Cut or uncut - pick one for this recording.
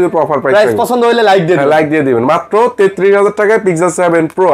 uncut